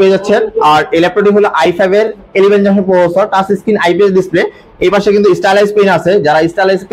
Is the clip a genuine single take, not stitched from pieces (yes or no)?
yes